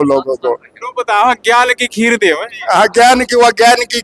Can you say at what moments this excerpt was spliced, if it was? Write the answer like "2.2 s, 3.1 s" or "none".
none